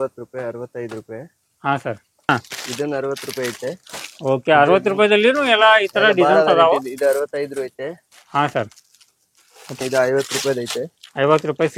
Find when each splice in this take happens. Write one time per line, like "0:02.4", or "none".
0:02.3
0:09.8